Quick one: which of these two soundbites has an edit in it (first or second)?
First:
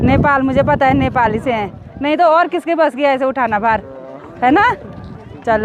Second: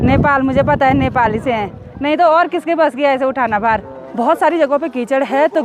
second